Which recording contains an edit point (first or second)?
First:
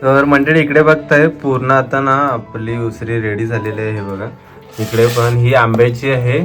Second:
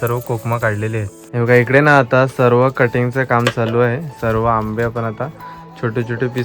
second